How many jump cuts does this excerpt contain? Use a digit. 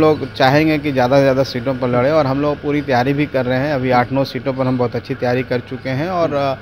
0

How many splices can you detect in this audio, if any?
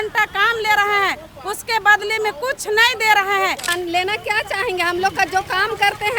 1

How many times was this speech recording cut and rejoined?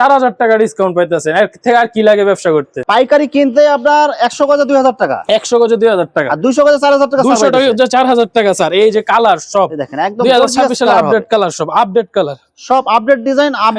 0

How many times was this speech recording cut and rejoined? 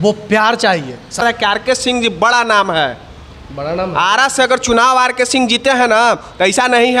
1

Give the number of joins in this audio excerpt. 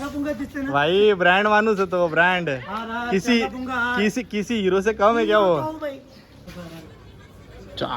1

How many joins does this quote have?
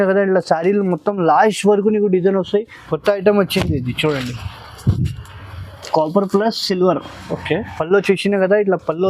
1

